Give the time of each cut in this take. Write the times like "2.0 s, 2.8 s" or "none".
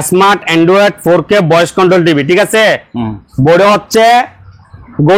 none

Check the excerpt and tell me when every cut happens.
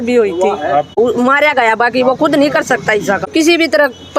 1.0 s, 3.3 s

